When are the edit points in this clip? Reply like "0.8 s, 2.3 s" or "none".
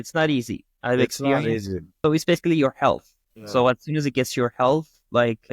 1.8 s